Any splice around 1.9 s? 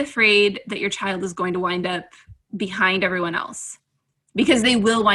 no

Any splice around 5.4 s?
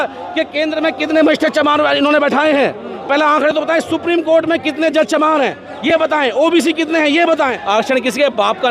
no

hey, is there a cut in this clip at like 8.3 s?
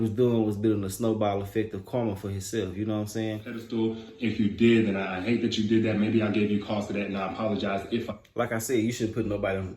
no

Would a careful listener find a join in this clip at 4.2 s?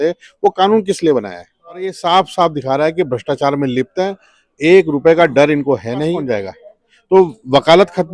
no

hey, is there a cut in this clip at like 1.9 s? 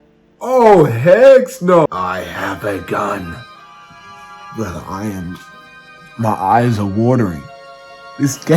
yes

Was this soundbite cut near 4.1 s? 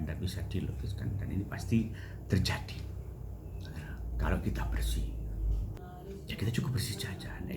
no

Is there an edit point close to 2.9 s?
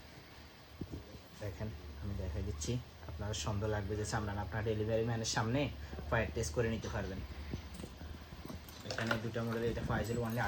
no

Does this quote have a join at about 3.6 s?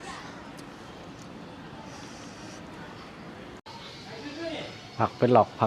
yes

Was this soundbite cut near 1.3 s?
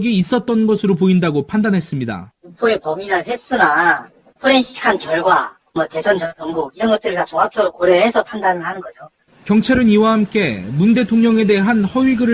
yes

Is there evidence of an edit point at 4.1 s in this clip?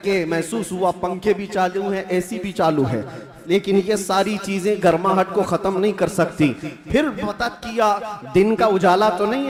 no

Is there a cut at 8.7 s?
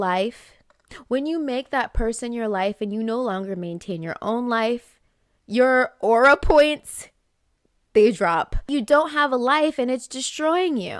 yes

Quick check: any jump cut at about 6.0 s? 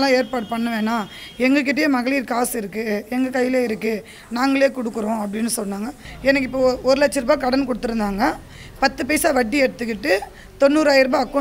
yes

